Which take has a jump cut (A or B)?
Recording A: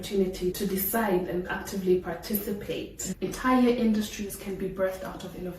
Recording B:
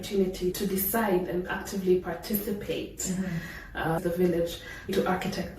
A